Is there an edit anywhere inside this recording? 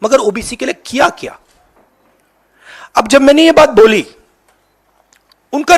no; 0 cuts

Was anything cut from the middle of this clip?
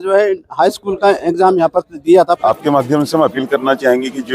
yes; 1 cut; at 2.4 s

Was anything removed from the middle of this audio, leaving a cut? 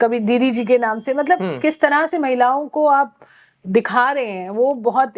no; 0 cuts

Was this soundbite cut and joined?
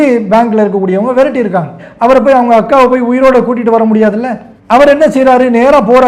yes; 1 cut; at 1.8 s

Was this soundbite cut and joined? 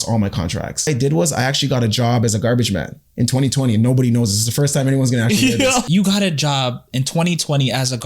yes; 2 cuts; at 0.9 s, 5.8 s

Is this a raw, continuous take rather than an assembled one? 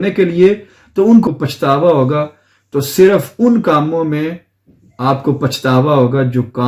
no; 1 cut; at 1.2 s

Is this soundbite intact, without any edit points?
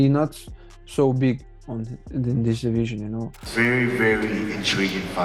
no; 1 cut; at 3.4 s

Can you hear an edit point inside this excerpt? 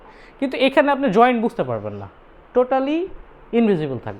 no; 0 cuts

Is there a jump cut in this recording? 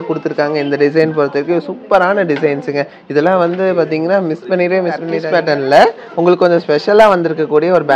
yes; 1 cut; at 5.1 s

